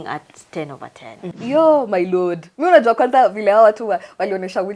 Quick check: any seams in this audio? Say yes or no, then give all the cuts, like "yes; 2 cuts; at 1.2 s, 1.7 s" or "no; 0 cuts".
yes; 1 cut; at 1.3 s